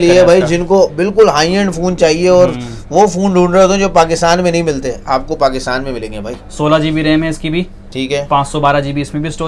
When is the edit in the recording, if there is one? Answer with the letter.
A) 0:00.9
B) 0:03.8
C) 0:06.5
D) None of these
D